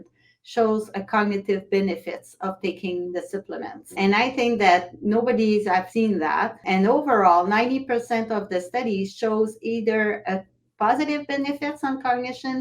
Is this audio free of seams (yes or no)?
no